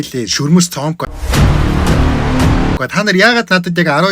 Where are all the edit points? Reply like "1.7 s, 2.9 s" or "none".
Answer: 1.1 s, 2.8 s